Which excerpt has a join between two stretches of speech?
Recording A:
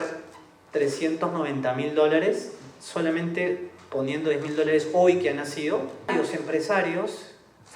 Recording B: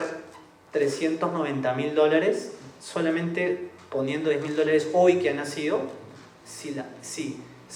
A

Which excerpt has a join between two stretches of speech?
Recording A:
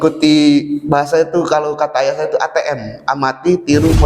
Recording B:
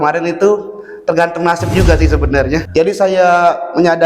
B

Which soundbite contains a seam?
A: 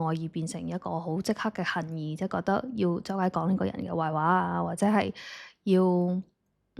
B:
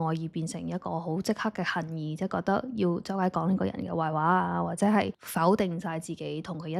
B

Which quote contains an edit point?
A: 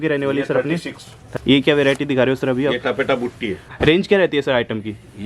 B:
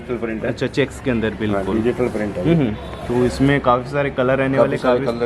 A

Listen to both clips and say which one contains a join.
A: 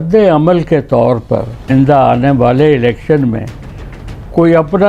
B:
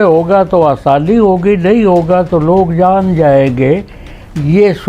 A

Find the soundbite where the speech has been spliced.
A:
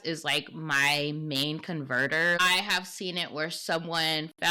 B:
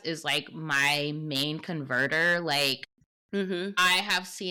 A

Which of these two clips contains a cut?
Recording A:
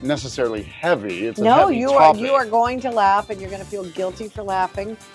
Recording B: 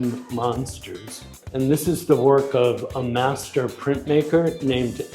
B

